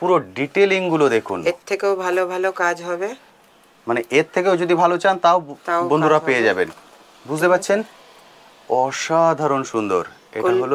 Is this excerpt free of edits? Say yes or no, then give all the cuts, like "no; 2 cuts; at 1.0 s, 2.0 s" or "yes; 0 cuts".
yes; 0 cuts